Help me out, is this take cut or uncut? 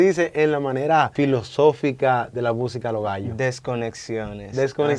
cut